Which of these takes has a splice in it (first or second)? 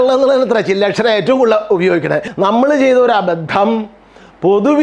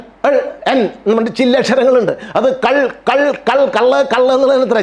first